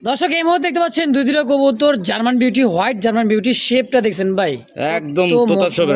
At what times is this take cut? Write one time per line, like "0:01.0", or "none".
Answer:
none

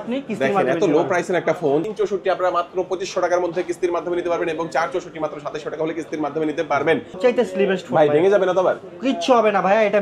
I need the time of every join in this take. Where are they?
0:01.8
0:07.2

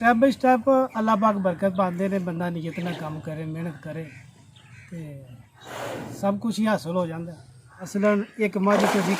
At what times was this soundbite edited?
0:07.9

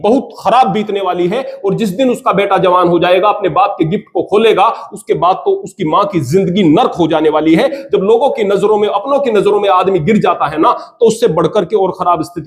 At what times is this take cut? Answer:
none

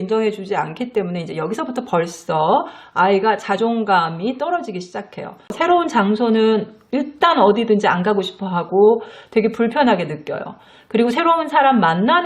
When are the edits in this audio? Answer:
0:05.5

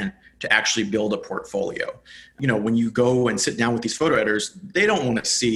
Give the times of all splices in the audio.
0:02.4

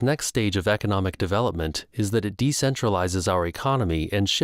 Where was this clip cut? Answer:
none

